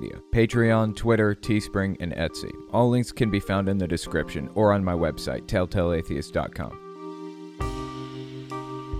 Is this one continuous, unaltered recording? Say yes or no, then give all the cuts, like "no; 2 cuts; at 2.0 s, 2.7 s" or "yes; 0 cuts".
no; 1 cut; at 6.9 s